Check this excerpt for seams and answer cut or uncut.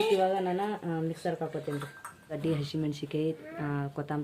cut